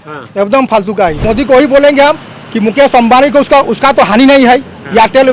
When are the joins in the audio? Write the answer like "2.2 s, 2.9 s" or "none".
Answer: 1.2 s